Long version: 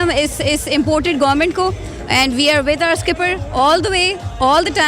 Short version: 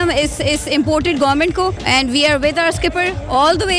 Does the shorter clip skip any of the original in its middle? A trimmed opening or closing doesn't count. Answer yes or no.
yes